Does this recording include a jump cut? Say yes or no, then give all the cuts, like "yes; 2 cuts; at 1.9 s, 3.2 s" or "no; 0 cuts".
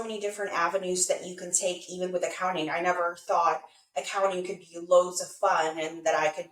no; 0 cuts